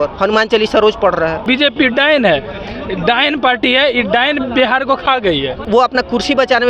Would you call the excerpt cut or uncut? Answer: cut